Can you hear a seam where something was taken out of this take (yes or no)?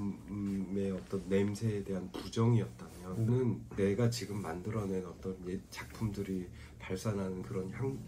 no